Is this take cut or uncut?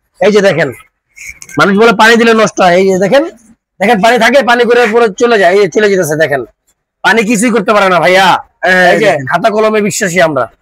uncut